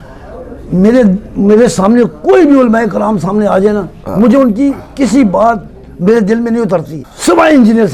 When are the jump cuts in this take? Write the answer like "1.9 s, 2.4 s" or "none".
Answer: 7.0 s